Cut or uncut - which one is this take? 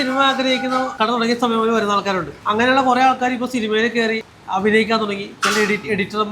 cut